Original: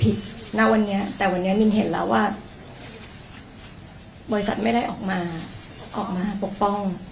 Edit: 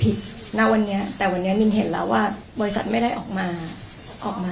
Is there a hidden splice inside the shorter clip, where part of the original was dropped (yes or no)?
yes